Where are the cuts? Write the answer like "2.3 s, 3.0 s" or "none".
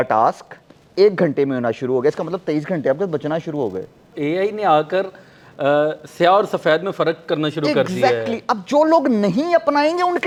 none